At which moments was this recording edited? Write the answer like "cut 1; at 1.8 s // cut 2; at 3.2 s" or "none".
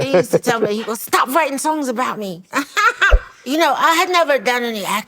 cut 1; at 3.3 s